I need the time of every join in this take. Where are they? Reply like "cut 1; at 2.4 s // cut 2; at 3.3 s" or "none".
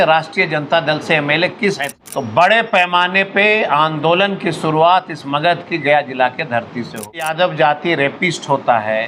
cut 1; at 1.9 s // cut 2; at 7.3 s